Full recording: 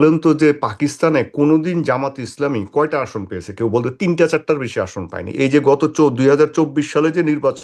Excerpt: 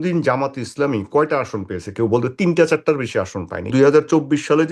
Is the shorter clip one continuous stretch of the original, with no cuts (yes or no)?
no